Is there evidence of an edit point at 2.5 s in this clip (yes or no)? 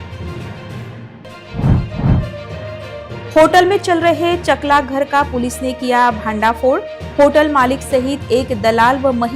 no